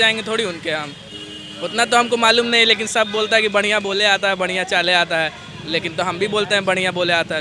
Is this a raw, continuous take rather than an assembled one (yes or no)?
yes